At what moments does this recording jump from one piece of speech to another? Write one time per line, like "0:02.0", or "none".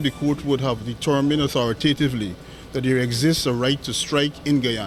none